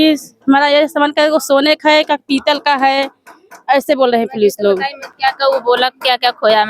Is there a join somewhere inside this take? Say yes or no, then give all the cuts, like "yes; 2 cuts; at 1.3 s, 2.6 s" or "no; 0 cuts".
no; 0 cuts